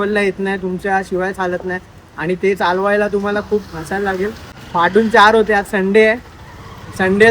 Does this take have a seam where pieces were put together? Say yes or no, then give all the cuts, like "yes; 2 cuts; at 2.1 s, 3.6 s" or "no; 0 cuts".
yes; 1 cut; at 4.5 s